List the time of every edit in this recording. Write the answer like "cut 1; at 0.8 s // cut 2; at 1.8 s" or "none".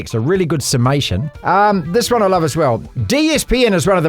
cut 1; at 1.2 s // cut 2; at 2.9 s